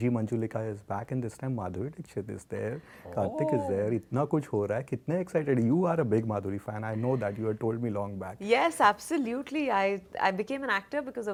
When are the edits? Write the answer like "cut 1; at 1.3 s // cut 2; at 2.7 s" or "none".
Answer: none